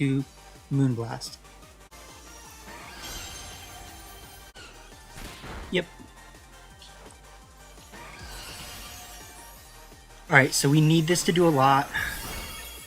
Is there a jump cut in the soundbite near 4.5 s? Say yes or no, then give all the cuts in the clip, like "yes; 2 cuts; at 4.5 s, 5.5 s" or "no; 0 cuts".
yes; 2 cuts; at 1.9 s, 4.5 s